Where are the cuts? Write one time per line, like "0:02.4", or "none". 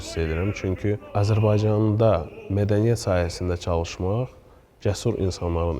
none

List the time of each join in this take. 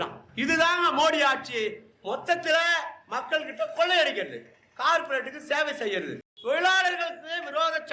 0:06.2

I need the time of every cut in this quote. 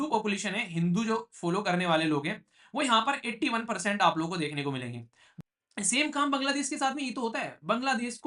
0:05.3

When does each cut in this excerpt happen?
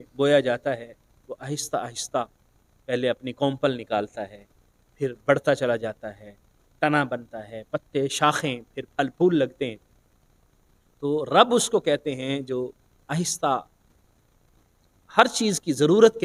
none

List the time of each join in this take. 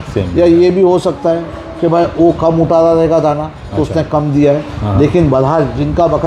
none

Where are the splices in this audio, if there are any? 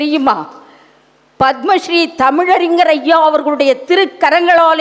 none

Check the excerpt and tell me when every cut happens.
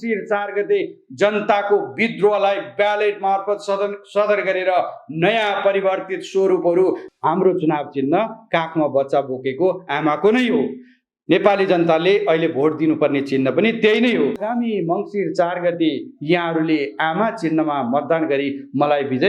0:07.1
0:14.4

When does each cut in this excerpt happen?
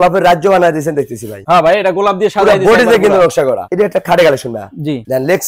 0:03.6

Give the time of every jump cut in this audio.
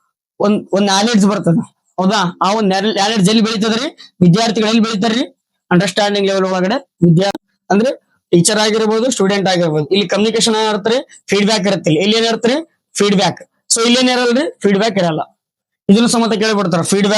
0:07.4

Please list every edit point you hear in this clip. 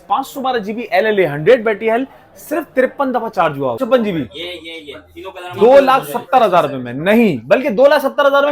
0:03.8

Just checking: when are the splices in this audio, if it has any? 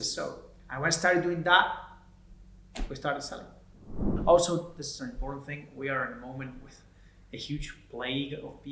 0:04.1

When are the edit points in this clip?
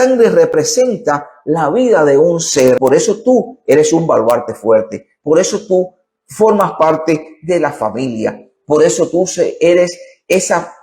0:02.8

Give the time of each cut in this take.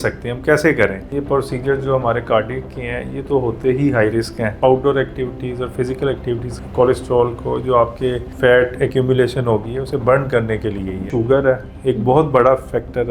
0:01.1
0:04.5
0:06.5
0:08.3
0:11.1

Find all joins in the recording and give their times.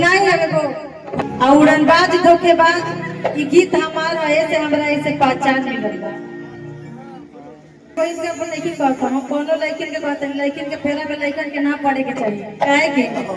0:01.2
0:07.9

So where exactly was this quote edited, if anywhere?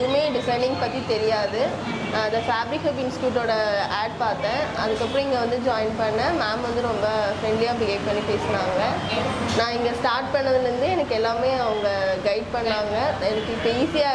none

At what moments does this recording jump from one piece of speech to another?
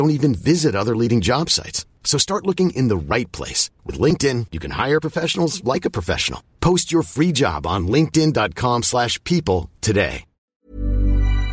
0:10.5

